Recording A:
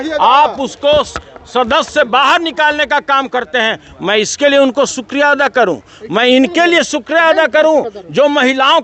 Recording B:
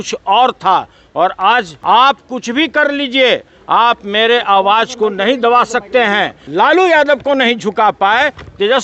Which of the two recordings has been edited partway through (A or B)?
B